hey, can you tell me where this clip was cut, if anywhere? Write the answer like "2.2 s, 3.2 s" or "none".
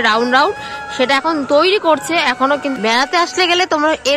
2.8 s